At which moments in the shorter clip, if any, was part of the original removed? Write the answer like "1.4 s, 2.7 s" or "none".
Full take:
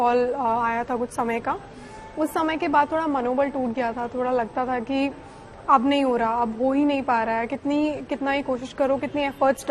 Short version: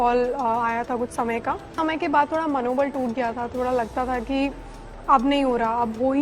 1.7 s

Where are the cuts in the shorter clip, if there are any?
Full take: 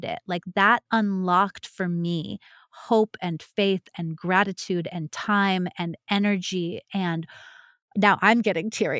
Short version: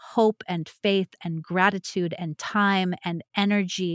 none

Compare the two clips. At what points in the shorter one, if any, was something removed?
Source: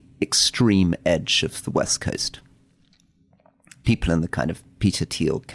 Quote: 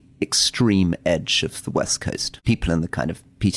2.3 s

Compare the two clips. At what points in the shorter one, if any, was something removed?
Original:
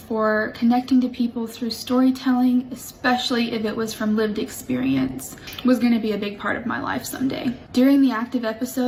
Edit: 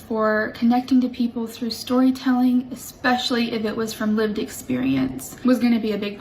5.3 s

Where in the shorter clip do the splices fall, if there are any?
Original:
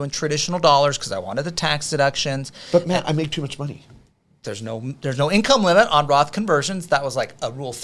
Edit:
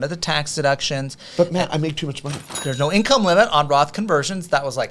2.5 s

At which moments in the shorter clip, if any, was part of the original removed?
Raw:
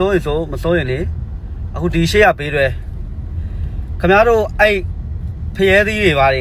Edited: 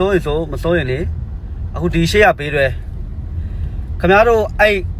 none

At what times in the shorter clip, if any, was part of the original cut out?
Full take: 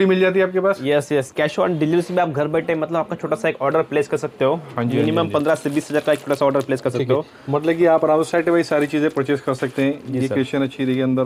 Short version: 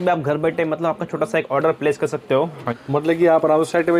2.7 s

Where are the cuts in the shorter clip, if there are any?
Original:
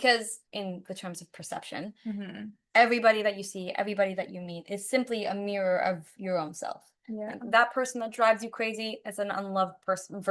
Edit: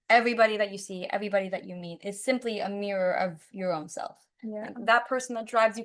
none

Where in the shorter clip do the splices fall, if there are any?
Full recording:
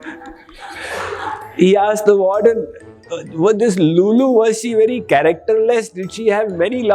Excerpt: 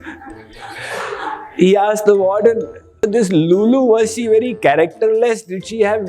3.1 s

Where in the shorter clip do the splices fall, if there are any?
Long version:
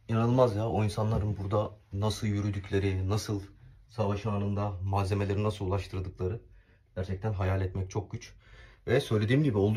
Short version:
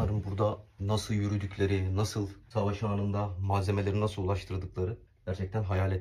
2.4 s, 5.1 s

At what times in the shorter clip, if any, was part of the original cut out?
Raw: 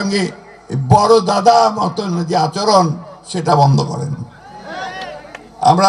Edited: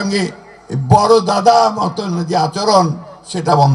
none

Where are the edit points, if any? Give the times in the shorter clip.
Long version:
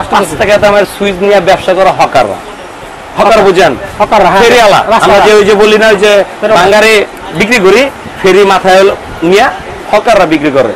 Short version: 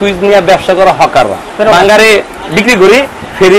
1.5 s

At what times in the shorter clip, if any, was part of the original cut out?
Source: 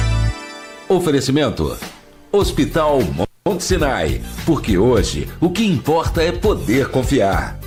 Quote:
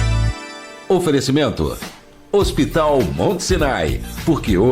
3.2 s

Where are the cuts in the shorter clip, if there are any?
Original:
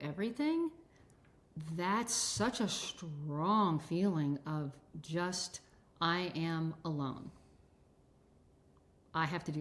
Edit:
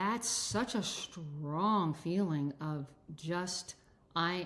none

